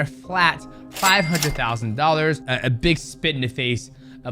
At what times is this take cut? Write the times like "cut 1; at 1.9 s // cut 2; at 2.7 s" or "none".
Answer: cut 1; at 2.5 s